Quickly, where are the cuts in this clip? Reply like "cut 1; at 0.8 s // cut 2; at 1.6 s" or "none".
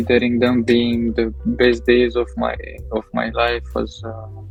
none